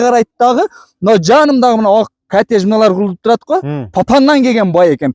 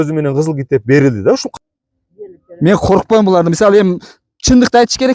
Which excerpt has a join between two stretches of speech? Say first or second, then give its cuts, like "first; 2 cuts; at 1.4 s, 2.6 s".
second; 1 cut; at 1.5 s